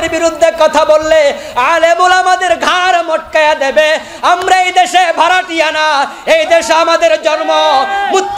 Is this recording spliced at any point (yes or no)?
no